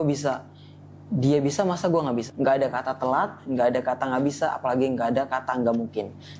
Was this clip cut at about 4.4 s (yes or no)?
no